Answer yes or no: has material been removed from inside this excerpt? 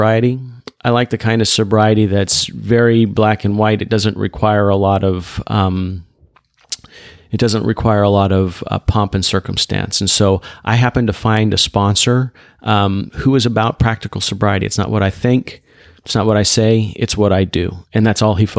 no